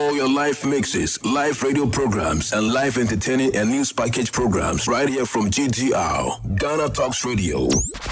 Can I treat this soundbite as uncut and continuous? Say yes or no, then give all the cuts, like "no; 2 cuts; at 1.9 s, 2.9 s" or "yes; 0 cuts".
yes; 0 cuts